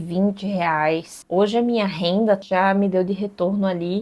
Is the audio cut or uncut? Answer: cut